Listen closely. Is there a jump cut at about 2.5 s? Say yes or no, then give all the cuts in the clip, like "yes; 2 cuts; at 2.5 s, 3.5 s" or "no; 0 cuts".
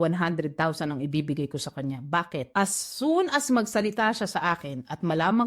yes; 1 cut; at 2.5 s